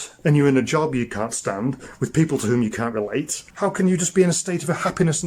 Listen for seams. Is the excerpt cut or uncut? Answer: cut